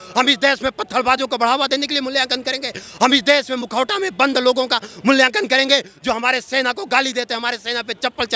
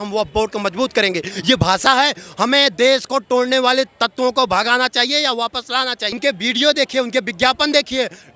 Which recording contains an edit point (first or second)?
second